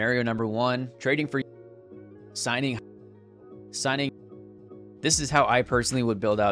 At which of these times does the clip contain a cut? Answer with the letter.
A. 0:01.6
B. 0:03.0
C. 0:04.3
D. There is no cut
D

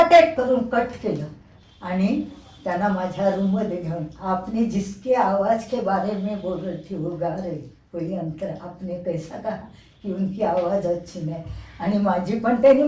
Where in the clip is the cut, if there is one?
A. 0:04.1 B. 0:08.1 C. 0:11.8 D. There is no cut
D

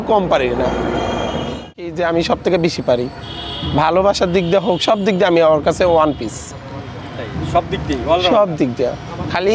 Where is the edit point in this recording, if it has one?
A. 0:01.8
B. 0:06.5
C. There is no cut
A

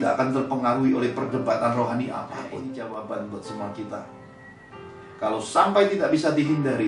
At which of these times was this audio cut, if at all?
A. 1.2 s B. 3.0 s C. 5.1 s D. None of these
B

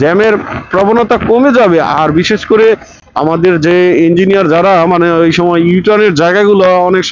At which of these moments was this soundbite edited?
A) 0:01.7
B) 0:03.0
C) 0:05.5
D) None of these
D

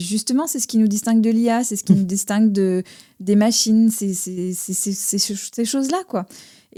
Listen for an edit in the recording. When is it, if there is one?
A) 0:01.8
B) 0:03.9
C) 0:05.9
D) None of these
D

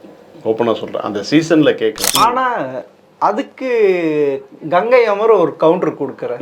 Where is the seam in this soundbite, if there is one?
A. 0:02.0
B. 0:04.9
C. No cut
A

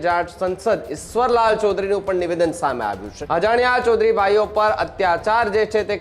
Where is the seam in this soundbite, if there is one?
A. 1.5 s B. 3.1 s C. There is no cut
B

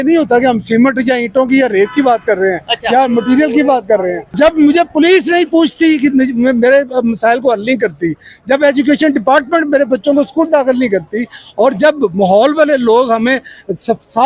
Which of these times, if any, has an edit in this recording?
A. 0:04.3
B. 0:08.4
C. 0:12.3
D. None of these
A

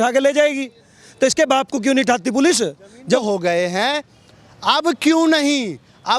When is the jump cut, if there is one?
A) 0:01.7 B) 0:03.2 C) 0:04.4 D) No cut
B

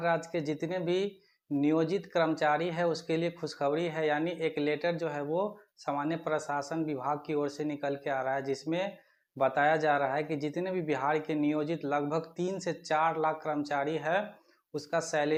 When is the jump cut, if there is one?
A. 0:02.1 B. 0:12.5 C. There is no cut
C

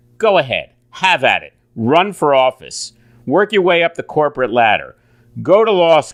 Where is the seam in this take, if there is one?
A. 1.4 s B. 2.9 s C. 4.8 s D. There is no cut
D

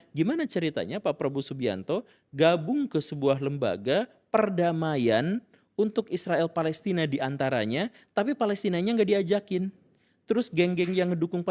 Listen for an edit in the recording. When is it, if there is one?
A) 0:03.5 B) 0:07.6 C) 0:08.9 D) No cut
D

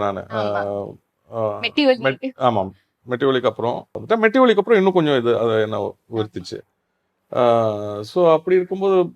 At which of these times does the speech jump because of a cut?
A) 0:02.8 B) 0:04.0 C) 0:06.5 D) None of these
B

